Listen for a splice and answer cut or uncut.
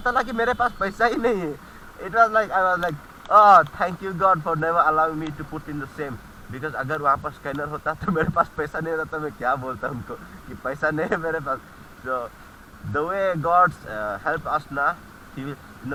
uncut